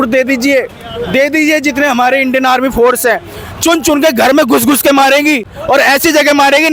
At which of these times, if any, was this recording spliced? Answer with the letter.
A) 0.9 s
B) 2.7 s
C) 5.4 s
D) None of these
D